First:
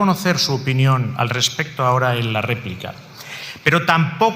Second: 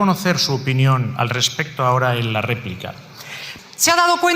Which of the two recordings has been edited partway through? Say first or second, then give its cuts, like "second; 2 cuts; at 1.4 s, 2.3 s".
second; 1 cut; at 3.5 s